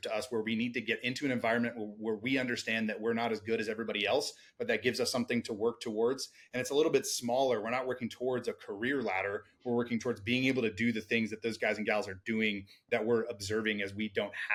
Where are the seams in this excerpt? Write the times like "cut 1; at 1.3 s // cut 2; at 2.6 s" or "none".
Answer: none

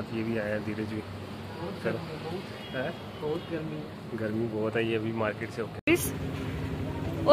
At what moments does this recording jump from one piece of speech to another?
cut 1; at 5.8 s

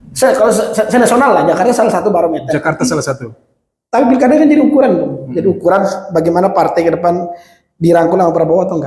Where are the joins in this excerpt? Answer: none

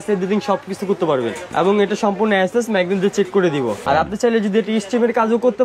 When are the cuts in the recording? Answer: cut 1; at 1.4 s // cut 2; at 3.8 s

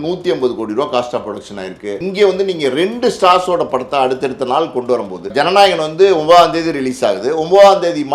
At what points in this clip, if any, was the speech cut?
cut 1; at 2.0 s // cut 2; at 5.2 s

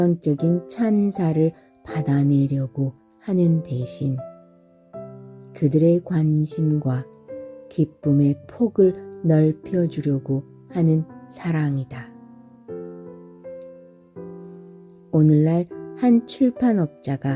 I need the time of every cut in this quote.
cut 1; at 11.8 s // cut 2; at 15.1 s

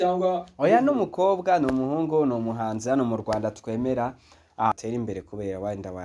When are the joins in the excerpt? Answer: cut 1; at 4.7 s

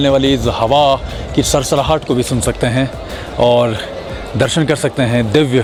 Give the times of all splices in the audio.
none

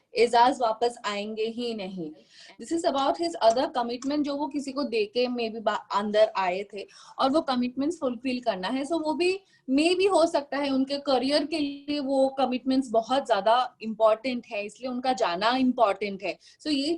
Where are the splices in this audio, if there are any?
cut 1; at 2.4 s

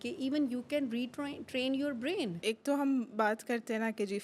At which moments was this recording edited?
cut 1; at 2.4 s

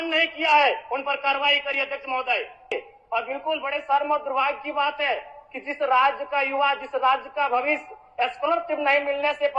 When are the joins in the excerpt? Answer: cut 1; at 2.7 s

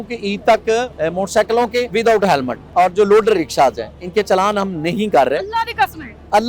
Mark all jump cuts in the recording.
cut 1; at 0.9 s // cut 2; at 1.9 s // cut 3; at 2.6 s

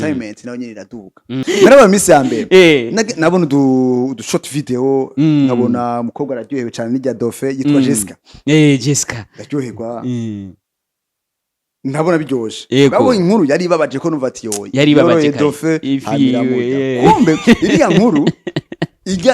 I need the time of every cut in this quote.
cut 1; at 1.3 s

